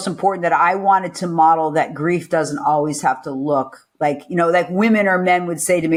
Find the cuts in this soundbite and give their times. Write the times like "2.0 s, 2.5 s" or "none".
none